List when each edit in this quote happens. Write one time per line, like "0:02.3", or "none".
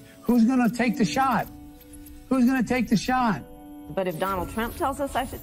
0:03.8

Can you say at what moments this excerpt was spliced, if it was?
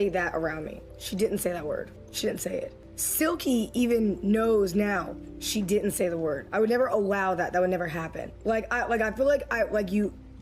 none

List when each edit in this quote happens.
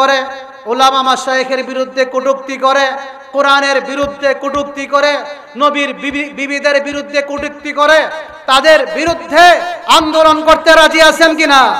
none

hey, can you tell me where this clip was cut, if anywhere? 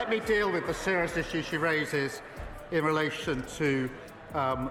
none

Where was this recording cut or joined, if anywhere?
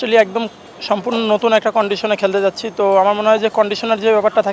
none

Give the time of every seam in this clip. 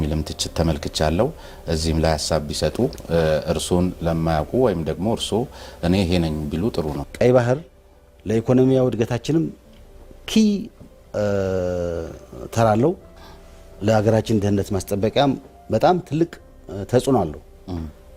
0:07.0

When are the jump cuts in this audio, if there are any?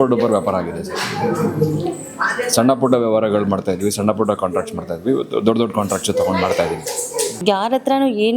0:07.4

